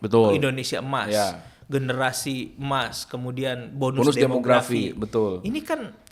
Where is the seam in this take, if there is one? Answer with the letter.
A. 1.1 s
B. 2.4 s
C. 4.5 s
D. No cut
D